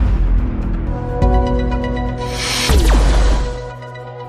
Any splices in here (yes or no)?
yes